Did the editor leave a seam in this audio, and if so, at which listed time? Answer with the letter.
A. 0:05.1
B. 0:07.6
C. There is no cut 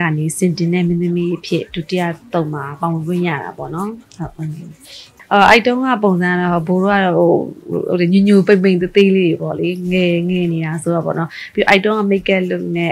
A